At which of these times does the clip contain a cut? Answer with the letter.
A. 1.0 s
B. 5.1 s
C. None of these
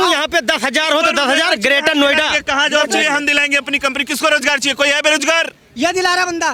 C